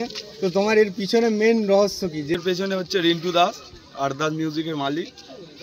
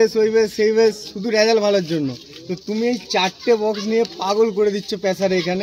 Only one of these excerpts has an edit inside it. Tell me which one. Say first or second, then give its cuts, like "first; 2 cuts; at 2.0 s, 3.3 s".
first; 1 cut; at 2.3 s